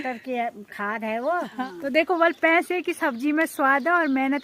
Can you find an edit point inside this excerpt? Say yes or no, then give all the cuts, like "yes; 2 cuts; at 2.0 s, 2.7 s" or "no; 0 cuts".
yes; 1 cut; at 1.5 s